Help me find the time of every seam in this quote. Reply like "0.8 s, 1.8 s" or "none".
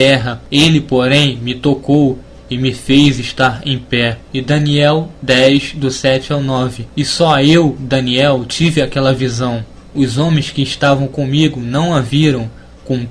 8.5 s